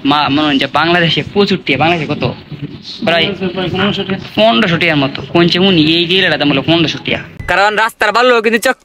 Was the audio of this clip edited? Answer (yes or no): yes